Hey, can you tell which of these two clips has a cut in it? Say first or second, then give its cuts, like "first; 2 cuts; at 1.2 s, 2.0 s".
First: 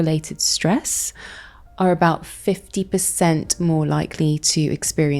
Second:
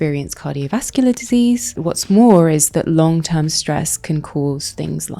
second; 1 cut; at 1.8 s